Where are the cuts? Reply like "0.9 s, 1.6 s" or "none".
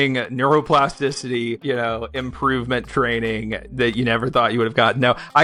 none